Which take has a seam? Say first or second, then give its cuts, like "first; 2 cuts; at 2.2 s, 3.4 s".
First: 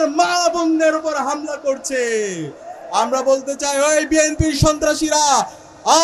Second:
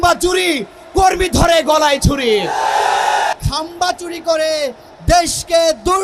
second; 1 cut; at 3.3 s